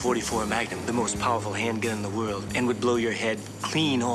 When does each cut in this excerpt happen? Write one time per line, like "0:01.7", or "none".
none